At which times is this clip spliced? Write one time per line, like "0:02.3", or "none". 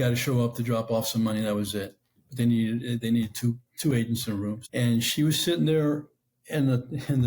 0:04.6

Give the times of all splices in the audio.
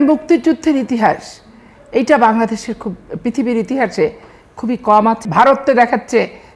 0:05.2

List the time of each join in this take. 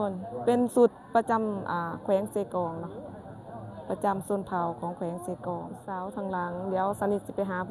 0:05.8

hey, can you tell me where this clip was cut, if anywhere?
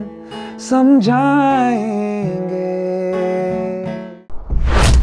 0:04.1

